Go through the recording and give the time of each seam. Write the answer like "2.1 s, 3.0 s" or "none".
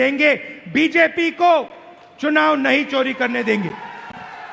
none